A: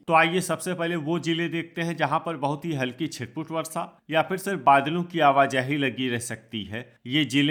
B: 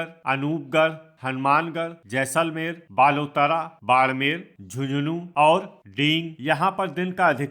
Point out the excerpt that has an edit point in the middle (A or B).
B